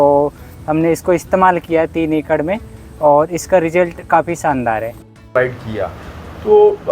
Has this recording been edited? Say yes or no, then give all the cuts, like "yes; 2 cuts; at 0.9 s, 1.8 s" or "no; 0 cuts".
yes; 1 cut; at 5.2 s